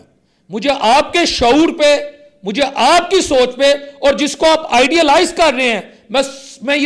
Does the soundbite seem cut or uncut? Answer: uncut